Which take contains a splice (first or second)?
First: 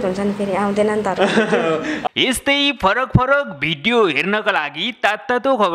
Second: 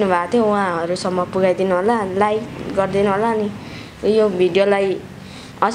first